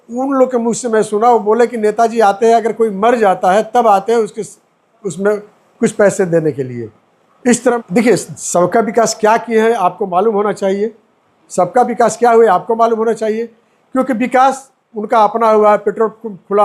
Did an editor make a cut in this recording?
yes; 1 cut; at 7.8 s

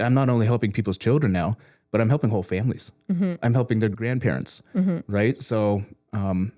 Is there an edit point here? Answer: yes; 1 cut; at 3.9 s

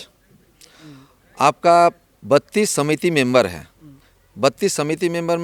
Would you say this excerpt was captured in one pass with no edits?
yes; 0 cuts

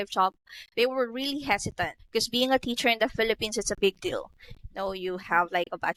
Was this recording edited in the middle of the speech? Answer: no; 0 cuts

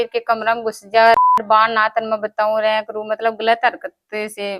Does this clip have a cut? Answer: no; 0 cuts

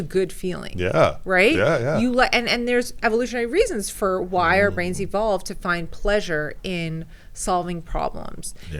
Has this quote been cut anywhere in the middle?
no; 0 cuts

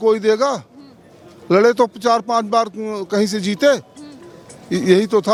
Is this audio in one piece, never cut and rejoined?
yes; 0 cuts

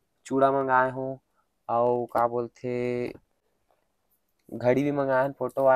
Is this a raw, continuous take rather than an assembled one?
yes; 0 cuts

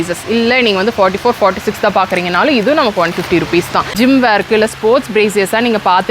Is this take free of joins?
no; 1 cut; at 4.0 s

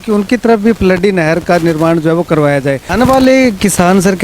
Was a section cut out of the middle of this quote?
yes; 1 cut; at 2.9 s

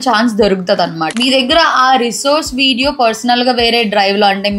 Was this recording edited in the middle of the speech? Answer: yes; 1 cut; at 1.1 s

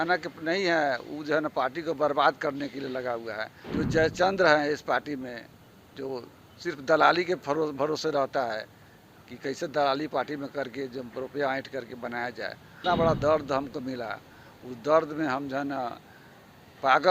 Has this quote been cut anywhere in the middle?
yes; 2 cuts; at 3.6 s, 12.8 s

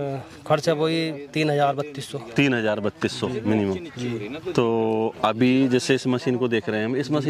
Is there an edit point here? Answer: no; 0 cuts

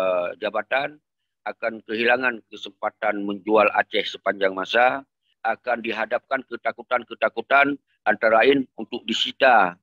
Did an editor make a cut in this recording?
yes; 1 cut; at 5.2 s

